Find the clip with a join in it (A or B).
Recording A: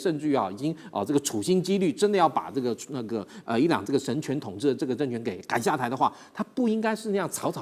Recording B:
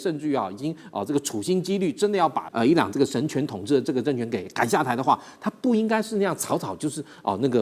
B